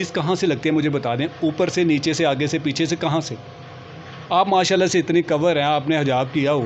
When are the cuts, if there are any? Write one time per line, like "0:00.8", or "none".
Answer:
none